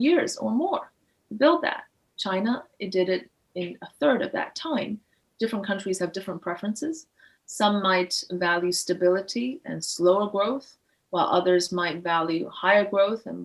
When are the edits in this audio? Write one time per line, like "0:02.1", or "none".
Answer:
0:05.2

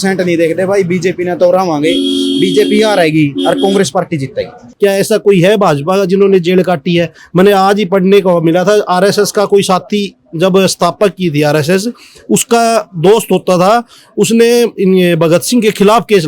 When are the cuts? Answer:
0:04.6

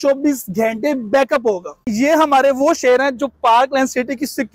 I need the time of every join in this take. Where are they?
0:01.9

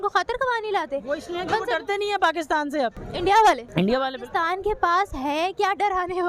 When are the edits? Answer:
0:03.0
0:03.7

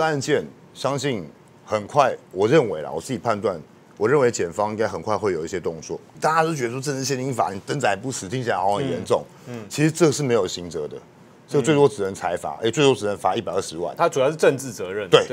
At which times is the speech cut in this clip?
0:06.2

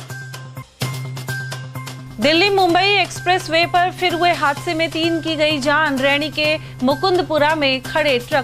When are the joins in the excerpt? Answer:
none

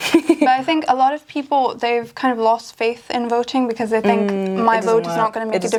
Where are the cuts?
none

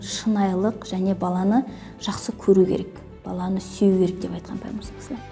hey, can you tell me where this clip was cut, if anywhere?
none

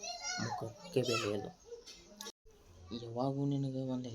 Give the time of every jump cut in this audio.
0:02.3

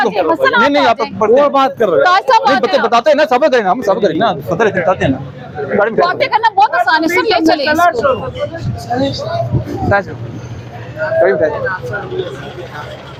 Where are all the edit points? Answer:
none

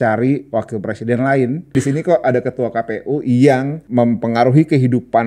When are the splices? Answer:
0:01.7
0:03.8

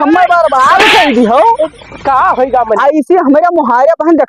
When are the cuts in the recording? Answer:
none

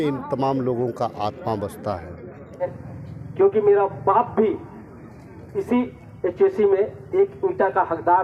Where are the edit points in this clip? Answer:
0:02.6

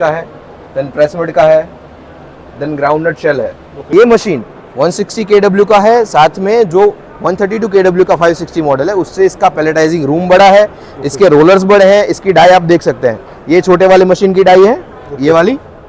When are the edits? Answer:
0:03.7

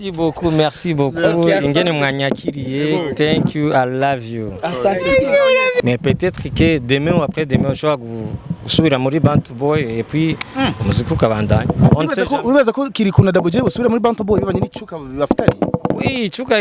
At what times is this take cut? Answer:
0:05.8

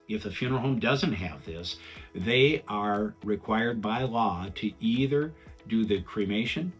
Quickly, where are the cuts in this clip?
0:03.2

